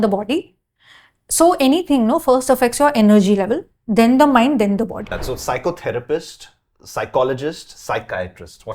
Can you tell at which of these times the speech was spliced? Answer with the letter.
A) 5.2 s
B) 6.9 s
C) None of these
A